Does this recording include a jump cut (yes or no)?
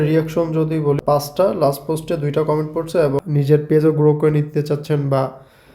yes